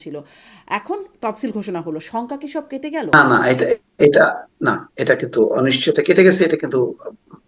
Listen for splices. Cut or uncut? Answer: cut